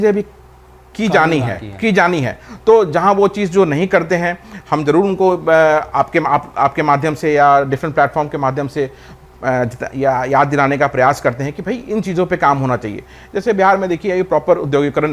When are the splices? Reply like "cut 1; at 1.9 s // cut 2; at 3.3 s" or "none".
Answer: none